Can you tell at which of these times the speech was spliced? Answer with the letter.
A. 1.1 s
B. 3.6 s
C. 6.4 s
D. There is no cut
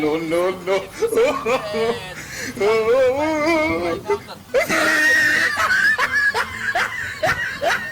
A